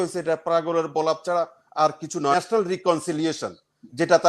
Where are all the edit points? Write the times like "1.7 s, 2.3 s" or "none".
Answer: 2.3 s